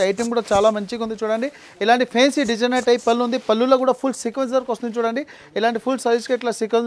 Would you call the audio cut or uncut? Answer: uncut